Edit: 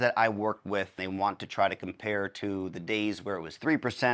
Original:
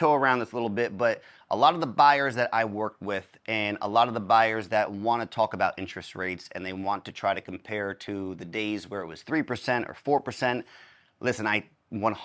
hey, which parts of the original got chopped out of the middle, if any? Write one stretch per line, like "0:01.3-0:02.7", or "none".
0:03.3-0:06.6

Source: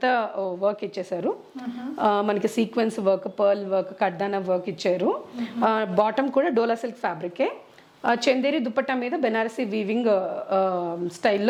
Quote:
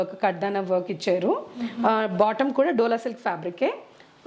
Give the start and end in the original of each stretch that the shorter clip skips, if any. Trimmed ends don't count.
none

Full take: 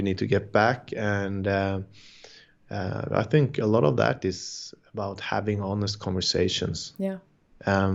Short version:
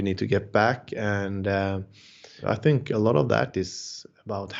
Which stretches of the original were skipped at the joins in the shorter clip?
0:02.3-0:03.0

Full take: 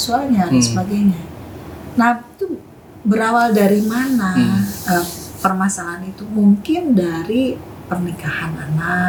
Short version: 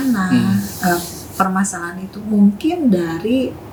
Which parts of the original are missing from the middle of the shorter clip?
none

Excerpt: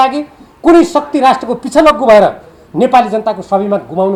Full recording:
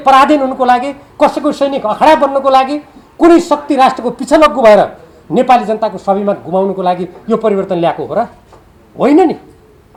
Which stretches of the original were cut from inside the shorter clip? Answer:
none

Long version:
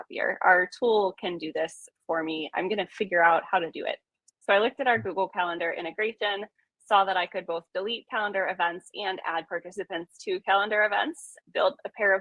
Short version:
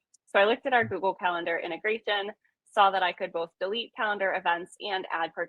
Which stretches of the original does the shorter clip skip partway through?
none

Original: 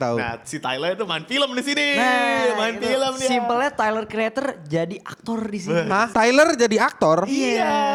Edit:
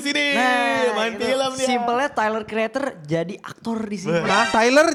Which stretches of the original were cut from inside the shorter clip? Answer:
none

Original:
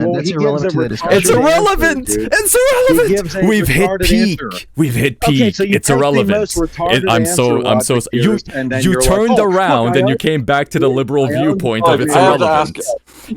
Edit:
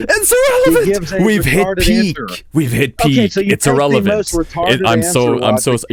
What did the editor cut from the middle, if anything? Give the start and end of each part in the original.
none

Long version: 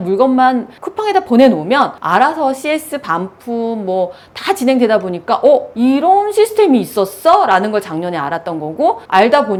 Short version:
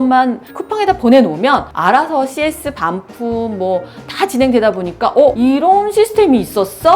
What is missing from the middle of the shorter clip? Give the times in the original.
0:05.6-0:05.8

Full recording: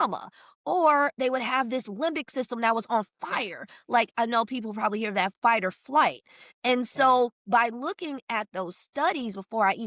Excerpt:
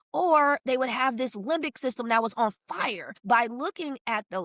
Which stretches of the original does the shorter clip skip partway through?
0:03.7-0:07.4

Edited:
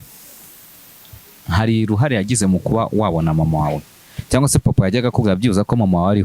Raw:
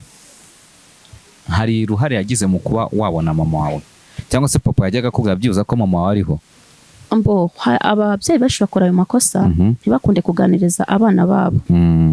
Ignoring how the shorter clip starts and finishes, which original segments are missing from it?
none

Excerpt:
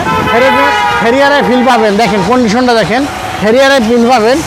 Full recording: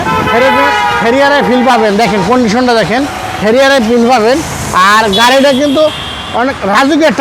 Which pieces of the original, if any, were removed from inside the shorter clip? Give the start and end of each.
none

